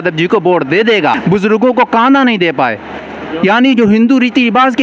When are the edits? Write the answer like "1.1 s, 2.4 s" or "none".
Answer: 1.2 s

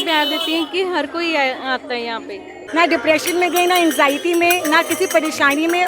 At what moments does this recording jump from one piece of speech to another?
2.6 s

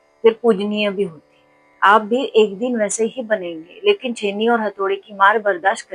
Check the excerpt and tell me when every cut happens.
none

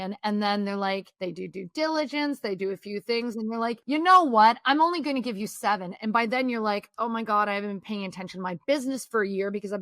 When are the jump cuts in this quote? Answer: 1.1 s, 3.8 s

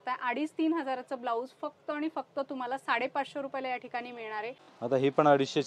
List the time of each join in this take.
4.7 s

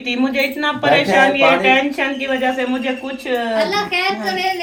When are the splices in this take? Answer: none

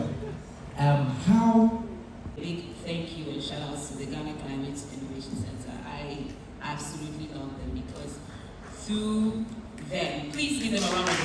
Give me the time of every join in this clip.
2.3 s

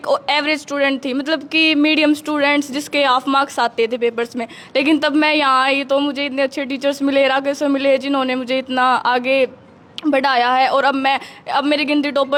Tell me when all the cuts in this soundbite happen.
none

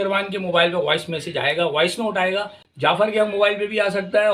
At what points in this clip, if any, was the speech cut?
2.6 s

